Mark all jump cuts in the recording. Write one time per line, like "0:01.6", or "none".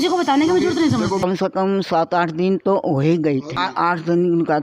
0:01.2
0:03.6